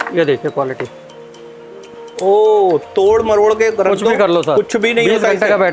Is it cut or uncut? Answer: uncut